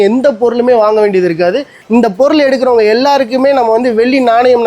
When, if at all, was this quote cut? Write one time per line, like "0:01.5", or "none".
0:01.8